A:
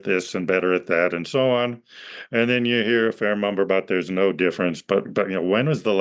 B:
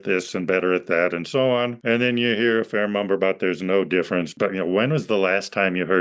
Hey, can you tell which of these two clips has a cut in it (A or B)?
B